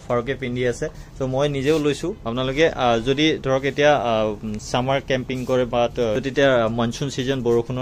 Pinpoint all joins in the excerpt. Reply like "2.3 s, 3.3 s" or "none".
6.2 s